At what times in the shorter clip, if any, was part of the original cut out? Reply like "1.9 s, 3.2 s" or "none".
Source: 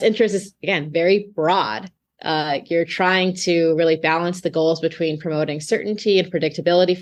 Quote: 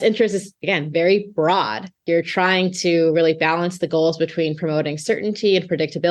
2.0 s